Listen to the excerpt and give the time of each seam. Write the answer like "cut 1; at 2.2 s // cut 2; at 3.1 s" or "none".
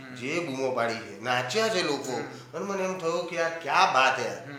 none

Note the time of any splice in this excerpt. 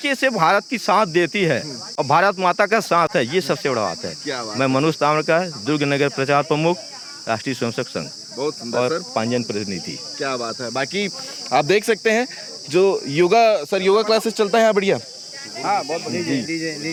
none

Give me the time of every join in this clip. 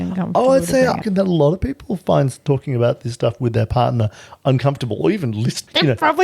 cut 1; at 1.0 s

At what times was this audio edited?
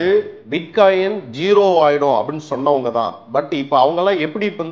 none

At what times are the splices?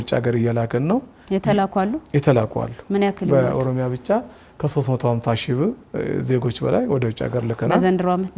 none

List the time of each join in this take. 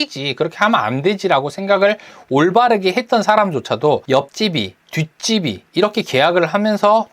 cut 1; at 4.2 s // cut 2; at 5.6 s

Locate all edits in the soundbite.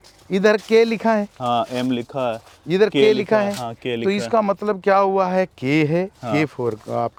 none

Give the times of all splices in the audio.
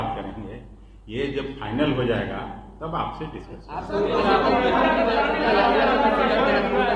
none

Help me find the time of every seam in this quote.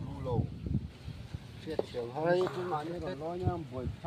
none

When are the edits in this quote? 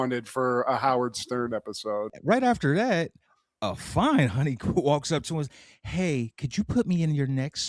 cut 1; at 2.2 s

